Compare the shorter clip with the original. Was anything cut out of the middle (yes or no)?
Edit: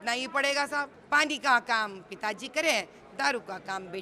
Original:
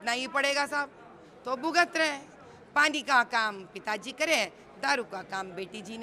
yes